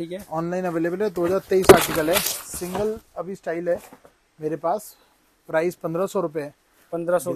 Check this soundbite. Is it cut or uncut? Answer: uncut